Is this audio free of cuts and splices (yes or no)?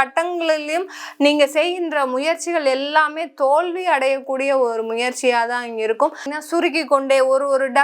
no